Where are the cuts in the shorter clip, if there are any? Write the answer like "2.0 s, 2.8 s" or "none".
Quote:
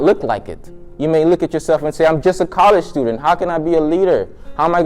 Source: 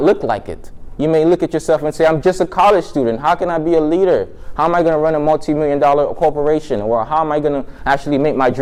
none